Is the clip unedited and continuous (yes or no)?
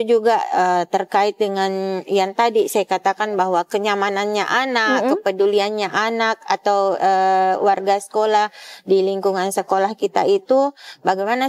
yes